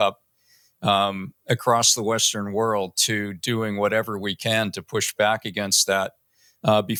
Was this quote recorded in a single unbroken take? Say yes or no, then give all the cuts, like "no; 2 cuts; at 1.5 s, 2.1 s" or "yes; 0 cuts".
yes; 0 cuts